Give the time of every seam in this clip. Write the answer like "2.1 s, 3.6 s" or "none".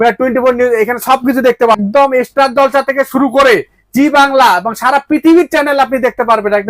1.8 s